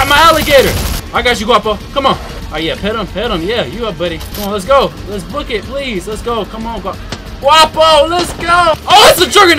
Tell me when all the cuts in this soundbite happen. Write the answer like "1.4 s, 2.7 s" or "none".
0.9 s, 2.4 s, 4.3 s, 8.8 s